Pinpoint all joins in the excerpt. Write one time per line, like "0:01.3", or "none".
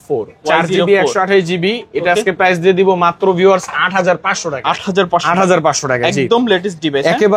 none